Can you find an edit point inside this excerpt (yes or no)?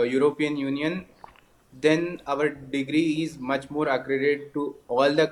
no